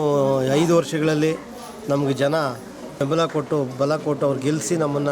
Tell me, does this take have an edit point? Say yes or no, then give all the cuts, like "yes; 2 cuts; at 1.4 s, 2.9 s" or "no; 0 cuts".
yes; 1 cut; at 2.9 s